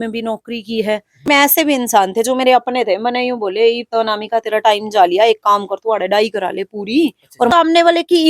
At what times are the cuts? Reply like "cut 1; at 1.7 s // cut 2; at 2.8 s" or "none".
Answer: cut 1; at 1.3 s // cut 2; at 7.5 s